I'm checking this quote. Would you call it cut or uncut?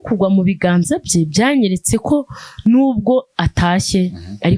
uncut